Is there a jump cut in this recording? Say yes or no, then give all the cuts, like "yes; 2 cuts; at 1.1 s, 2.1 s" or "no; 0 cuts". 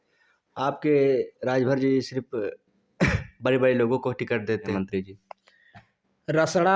no; 0 cuts